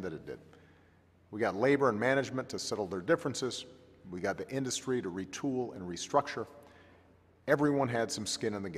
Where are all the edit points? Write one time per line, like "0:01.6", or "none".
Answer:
0:06.0